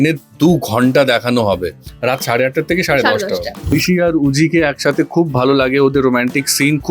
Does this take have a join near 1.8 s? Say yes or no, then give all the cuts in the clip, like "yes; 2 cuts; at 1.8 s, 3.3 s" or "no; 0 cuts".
no; 1 cut; at 3.7 s